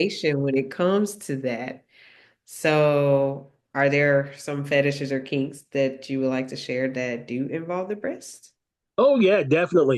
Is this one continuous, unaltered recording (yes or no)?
yes